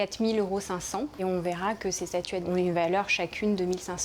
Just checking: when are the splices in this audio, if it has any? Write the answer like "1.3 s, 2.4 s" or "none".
2.5 s

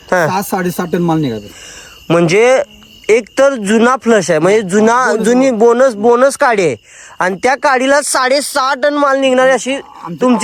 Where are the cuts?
none

